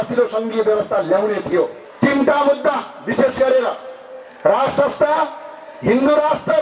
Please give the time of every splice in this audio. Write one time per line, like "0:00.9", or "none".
0:01.8